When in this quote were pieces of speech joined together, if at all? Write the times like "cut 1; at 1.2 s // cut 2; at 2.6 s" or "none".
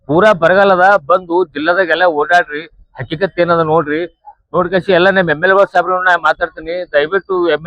none